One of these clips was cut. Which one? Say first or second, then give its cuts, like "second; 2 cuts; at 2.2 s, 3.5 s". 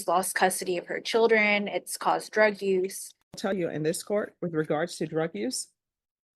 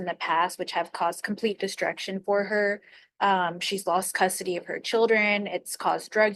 first; 1 cut; at 3.5 s